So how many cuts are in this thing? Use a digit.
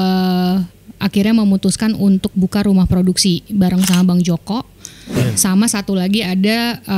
1